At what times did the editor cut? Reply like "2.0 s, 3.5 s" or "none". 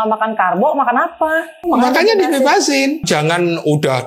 1.5 s, 3.0 s